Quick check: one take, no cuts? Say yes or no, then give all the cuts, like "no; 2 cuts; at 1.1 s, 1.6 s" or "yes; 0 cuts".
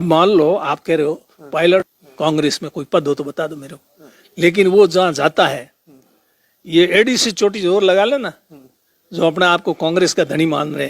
no; 1 cut; at 2.0 s